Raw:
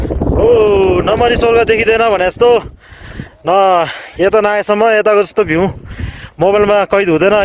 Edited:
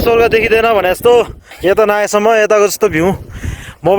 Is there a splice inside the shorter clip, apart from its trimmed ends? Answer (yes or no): yes